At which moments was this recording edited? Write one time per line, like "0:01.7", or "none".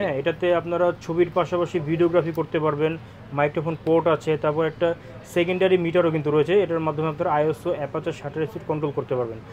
none